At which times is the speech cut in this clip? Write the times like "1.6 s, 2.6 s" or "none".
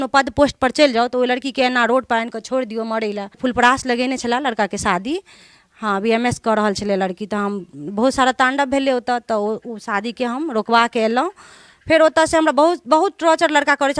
3.4 s